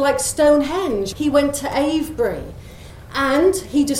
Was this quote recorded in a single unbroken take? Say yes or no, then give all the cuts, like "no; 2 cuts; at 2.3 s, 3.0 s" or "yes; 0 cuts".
no; 1 cut; at 1.1 s